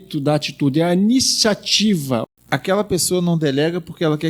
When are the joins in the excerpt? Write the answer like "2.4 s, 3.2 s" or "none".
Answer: 2.2 s

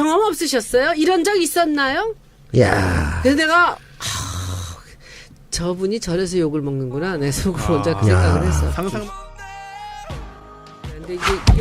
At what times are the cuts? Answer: none

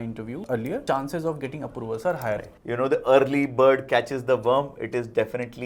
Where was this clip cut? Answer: 2.5 s

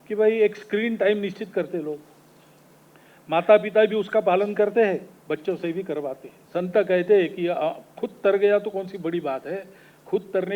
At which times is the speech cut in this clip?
6.3 s

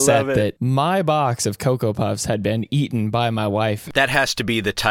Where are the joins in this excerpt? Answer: 3.8 s

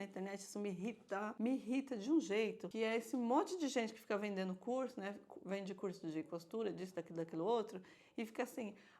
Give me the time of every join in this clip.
1.3 s, 2.6 s

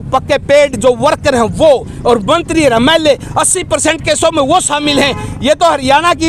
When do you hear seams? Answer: none

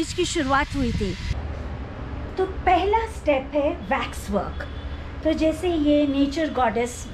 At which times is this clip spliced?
1.3 s

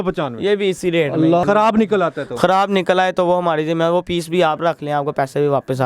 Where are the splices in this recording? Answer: 1.4 s

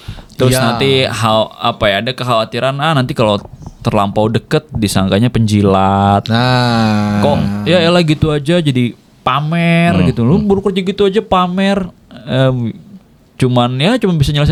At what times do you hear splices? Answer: none

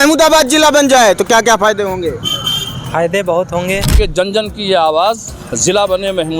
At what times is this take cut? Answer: 4.0 s

